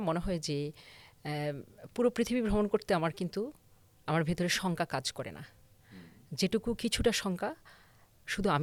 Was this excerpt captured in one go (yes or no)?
yes